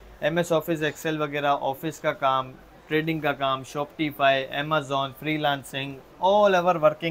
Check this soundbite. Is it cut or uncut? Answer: uncut